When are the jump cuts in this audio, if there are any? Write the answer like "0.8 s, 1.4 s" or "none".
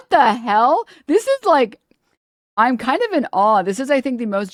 none